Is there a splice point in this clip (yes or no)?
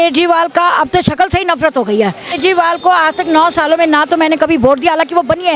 yes